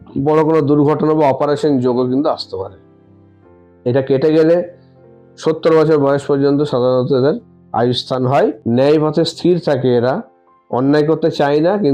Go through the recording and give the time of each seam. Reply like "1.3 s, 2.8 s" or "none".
8.6 s